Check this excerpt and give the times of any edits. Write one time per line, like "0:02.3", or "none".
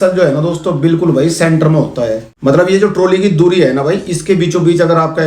0:02.3